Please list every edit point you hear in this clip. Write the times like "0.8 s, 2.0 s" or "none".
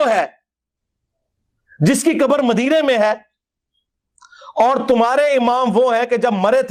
none

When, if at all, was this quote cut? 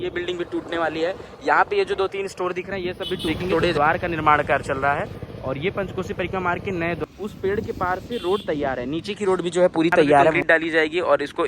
3.7 s, 7.0 s, 10.4 s

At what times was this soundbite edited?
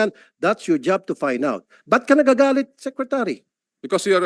none

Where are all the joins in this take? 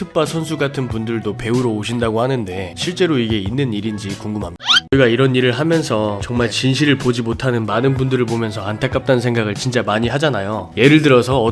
4.9 s

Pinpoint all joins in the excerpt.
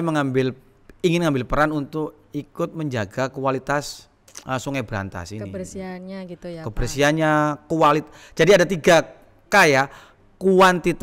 none

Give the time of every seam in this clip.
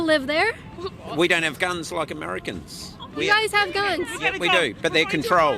1.3 s

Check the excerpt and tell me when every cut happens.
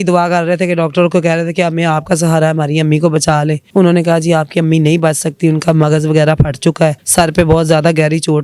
3.6 s, 7.0 s

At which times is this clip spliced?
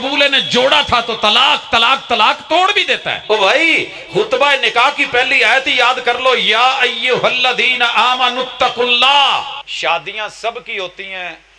3.1 s, 9.6 s

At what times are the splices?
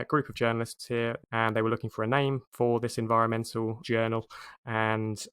1.2 s, 2.5 s, 3.8 s

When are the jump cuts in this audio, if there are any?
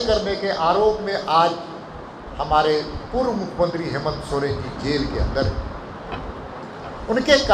none

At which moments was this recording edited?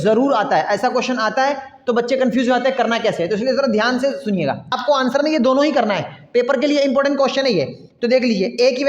4.7 s

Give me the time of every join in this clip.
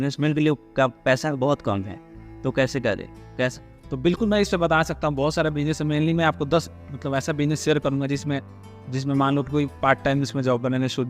3.2 s

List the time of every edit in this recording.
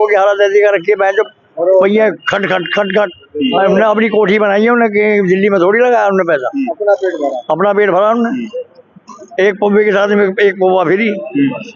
none

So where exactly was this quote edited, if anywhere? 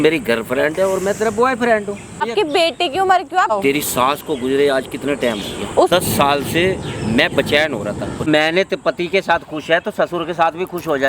2.2 s, 3.5 s, 5.9 s, 8.3 s

